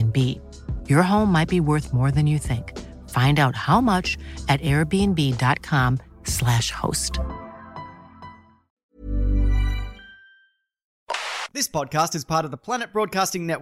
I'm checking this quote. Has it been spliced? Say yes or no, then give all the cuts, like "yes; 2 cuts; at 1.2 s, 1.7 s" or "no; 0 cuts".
yes; 2 cuts; at 8.7 s, 11.0 s